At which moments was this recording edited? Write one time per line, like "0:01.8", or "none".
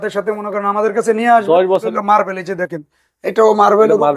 0:01.9